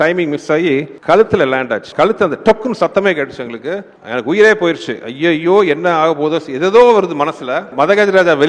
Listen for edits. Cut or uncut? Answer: cut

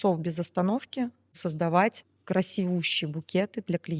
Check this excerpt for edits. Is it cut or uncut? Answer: cut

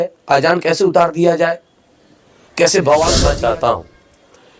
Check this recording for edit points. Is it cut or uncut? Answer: cut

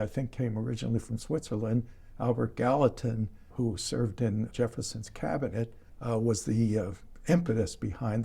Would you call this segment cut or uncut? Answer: cut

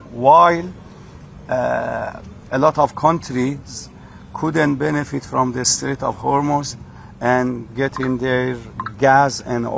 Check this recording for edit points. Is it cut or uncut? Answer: uncut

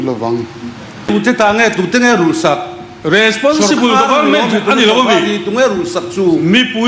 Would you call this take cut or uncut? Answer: cut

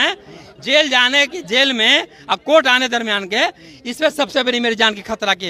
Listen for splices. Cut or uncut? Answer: uncut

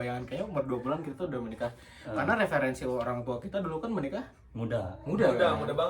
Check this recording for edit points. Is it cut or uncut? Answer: uncut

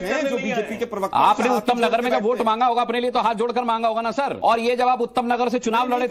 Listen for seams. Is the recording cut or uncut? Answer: cut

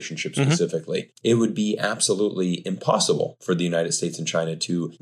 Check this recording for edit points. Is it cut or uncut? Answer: cut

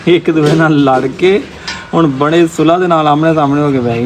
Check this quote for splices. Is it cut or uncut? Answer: uncut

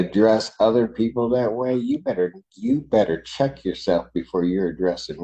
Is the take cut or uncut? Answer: uncut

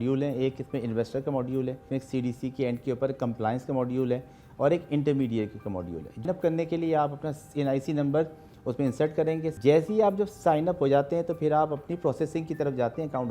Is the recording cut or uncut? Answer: cut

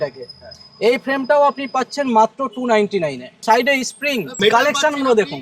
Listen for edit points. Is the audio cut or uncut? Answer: cut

